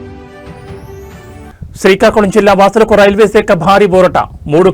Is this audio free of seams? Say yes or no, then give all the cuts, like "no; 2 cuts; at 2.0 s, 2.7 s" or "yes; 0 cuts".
no; 1 cut; at 1.3 s